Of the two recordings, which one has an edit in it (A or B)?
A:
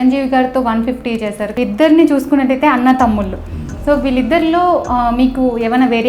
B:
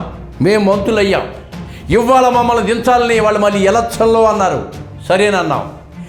A